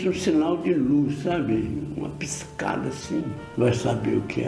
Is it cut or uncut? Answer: cut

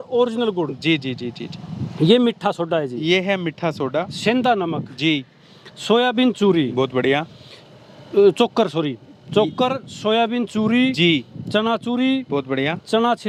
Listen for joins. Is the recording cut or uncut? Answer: uncut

